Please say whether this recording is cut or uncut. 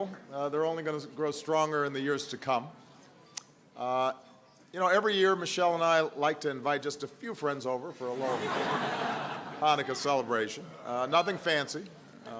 uncut